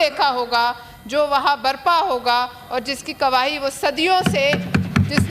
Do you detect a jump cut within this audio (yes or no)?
no